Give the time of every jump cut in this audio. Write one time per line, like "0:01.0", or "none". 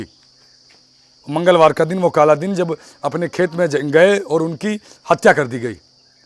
none